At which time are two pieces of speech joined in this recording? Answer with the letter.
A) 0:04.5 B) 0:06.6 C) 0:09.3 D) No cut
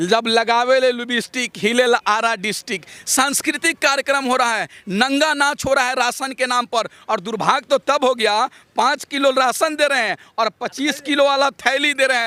D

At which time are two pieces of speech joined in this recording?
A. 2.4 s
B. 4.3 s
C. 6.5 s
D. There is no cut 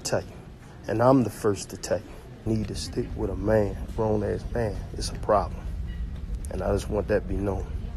A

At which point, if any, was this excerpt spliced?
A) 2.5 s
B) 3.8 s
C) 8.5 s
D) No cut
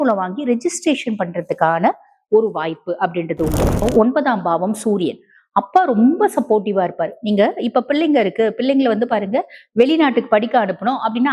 B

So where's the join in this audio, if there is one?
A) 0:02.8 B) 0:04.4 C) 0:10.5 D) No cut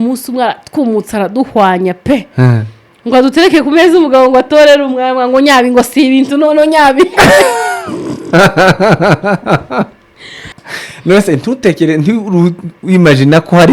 C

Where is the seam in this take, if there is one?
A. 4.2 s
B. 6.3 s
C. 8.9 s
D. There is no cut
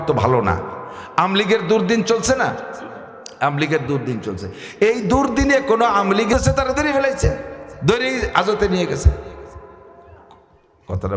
B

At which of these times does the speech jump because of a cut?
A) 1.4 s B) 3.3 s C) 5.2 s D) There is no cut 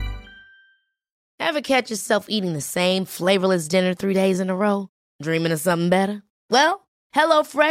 D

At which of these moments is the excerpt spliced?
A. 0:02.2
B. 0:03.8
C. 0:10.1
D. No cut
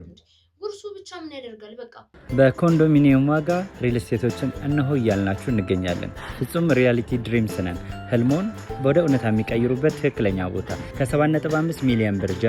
A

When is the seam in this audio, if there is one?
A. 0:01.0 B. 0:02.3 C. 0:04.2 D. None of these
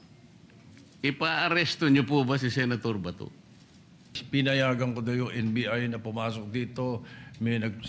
C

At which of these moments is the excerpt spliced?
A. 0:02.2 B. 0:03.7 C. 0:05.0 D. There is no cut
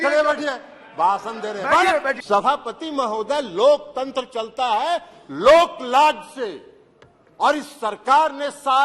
A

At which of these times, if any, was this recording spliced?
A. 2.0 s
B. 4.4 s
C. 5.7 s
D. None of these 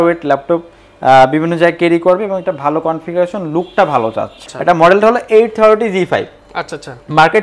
B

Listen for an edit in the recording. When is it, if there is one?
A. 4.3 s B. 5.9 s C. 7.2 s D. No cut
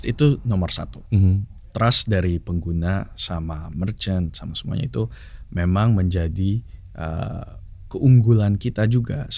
D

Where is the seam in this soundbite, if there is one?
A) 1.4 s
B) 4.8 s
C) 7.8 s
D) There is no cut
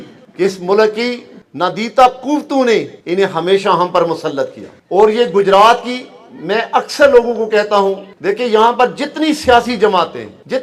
D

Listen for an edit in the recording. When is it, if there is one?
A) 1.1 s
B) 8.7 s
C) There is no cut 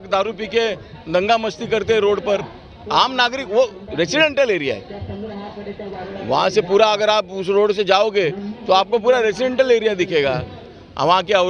C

